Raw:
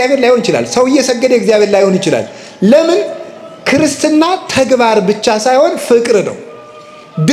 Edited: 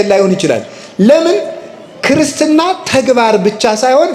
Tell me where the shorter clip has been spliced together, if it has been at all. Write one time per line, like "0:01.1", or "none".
none